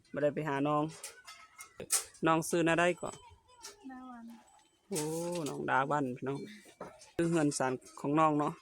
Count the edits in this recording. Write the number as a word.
two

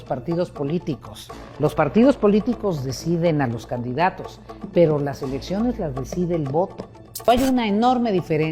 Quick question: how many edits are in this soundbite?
one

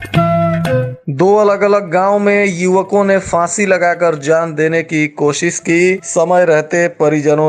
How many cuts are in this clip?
one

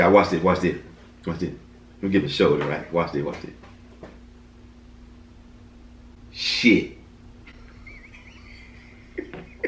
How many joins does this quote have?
zero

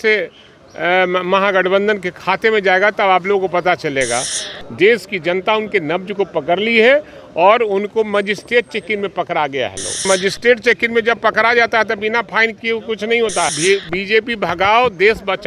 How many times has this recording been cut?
three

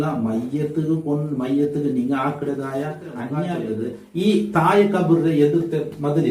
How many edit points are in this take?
one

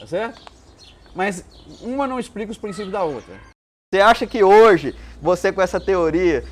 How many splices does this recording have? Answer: one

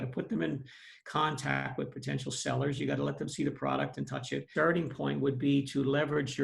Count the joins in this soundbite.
one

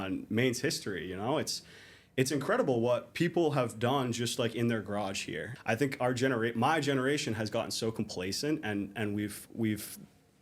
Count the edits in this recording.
one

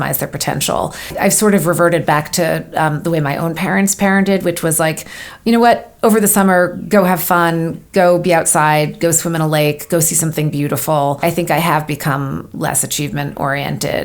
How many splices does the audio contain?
two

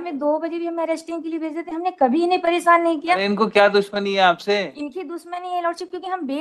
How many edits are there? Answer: one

